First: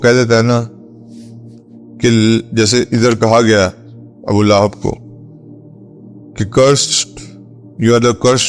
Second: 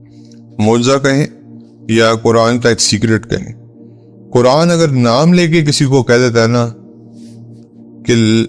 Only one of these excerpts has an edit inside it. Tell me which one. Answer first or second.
first